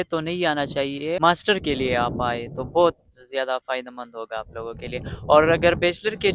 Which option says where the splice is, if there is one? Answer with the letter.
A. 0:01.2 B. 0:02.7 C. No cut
A